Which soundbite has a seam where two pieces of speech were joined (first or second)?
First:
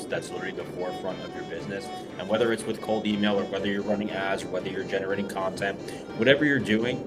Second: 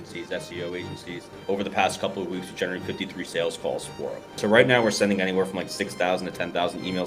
second